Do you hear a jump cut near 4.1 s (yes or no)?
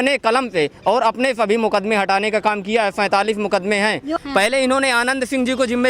yes